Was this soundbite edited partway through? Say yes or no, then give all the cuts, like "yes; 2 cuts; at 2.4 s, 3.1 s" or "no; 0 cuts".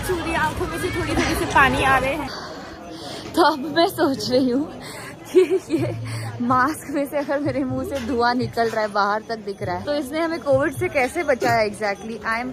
yes; 2 cuts; at 2.2 s, 9.8 s